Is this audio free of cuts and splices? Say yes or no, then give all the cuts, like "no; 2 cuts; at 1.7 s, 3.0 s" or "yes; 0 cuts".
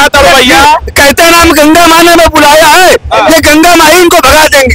yes; 0 cuts